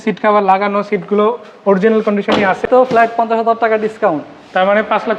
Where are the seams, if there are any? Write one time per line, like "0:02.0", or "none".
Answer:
0:02.7